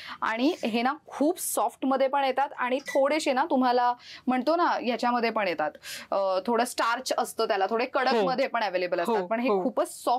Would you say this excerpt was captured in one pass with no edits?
yes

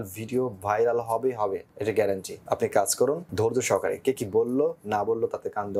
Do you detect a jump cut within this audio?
yes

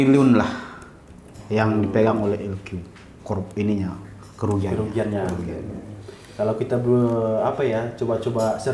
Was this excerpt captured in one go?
yes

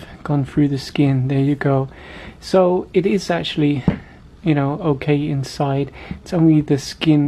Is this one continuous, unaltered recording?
yes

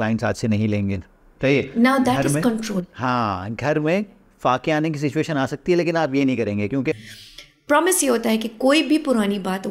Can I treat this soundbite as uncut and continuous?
no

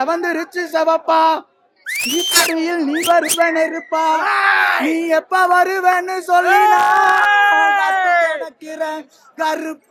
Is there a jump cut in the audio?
no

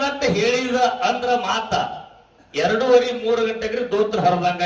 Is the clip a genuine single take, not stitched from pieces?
yes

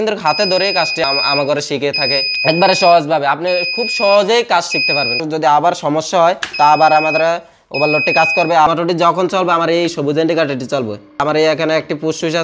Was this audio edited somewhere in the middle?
yes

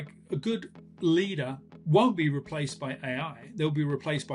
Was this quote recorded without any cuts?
no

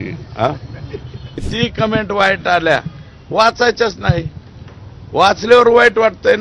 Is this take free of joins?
no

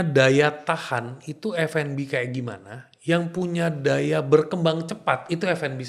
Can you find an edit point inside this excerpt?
no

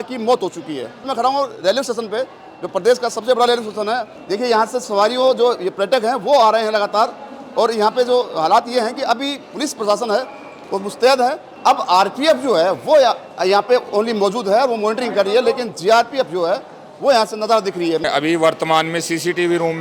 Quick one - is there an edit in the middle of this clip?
yes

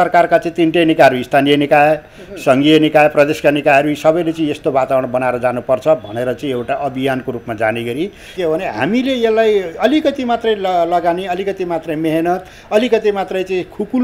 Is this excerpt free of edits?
no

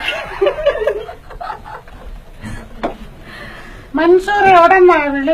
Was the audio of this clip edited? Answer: yes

